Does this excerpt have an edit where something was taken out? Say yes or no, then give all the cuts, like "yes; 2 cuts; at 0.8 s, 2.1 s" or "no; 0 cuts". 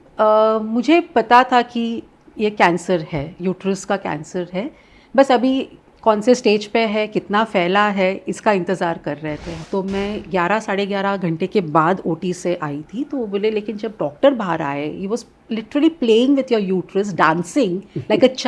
yes; 1 cut; at 9.5 s